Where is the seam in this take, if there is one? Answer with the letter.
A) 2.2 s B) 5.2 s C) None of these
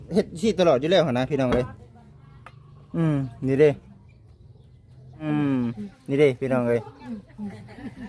B